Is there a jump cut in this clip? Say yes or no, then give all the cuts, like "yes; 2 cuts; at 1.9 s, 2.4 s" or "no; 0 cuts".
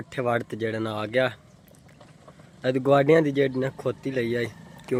no; 0 cuts